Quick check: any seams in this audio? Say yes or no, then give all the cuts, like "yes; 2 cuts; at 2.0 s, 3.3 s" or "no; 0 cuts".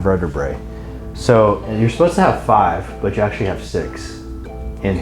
no; 0 cuts